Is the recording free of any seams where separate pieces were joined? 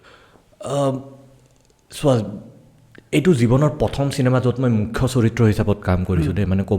yes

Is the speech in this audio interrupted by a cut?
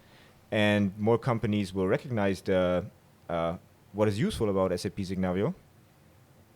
no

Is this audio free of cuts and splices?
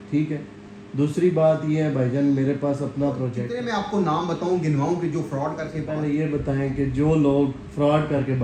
no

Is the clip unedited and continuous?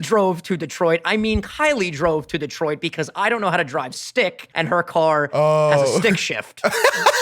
no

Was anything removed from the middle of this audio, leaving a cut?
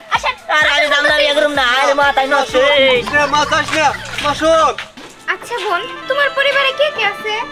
no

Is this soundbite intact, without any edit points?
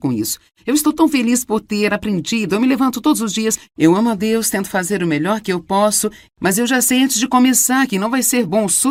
yes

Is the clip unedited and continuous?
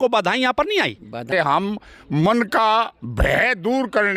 no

